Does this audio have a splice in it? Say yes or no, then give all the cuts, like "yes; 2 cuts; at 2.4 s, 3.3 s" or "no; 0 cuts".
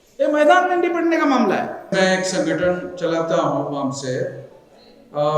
yes; 1 cut; at 1.9 s